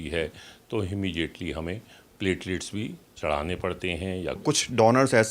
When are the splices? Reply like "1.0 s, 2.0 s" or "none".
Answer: 4.4 s